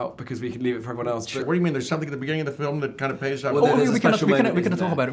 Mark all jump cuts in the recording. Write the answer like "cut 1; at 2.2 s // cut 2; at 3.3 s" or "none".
cut 1; at 1.4 s